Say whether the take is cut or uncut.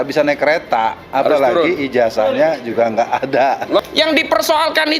cut